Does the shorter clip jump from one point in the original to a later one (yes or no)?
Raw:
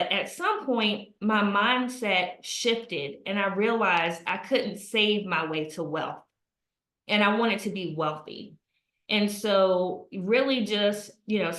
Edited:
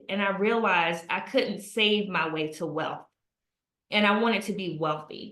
no